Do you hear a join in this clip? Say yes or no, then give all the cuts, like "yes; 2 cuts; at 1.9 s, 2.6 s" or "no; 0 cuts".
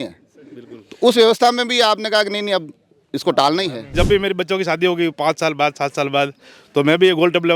yes; 1 cut; at 3.9 s